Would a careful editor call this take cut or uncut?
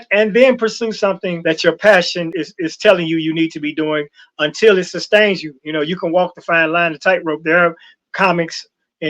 cut